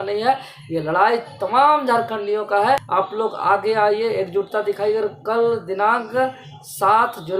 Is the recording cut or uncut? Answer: cut